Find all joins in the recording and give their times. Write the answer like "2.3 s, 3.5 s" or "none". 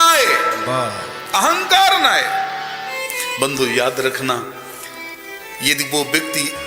3.0 s